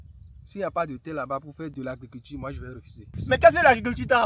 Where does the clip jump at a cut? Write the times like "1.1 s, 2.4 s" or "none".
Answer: 1.7 s, 3.1 s